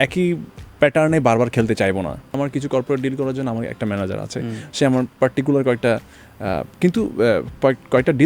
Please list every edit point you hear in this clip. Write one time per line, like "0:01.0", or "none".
0:02.3